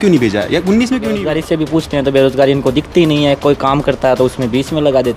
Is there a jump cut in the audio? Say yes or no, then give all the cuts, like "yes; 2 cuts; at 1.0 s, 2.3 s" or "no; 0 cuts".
yes; 1 cut; at 1.2 s